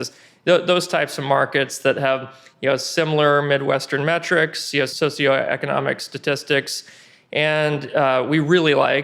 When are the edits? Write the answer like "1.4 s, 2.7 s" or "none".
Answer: 4.9 s